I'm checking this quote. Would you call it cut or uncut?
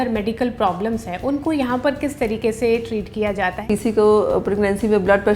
cut